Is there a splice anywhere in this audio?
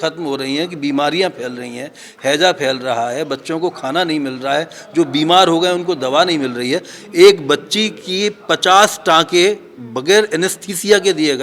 no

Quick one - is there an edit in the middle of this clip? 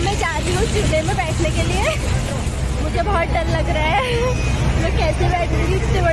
no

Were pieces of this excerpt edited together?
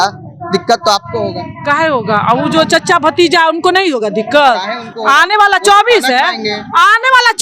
no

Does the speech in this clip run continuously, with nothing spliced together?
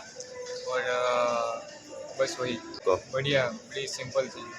no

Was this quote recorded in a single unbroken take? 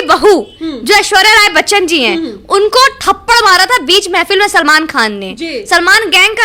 yes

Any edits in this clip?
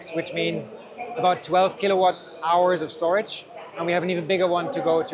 no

